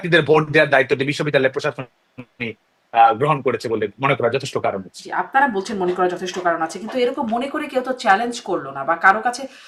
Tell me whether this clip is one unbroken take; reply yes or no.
yes